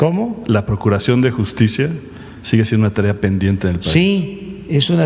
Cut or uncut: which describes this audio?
uncut